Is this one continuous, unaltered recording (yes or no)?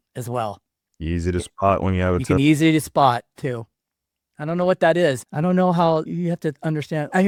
yes